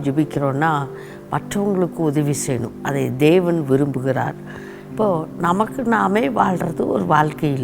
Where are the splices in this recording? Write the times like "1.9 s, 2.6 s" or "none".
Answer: none